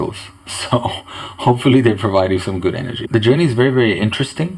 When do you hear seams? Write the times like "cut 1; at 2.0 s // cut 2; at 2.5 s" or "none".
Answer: cut 1; at 2.9 s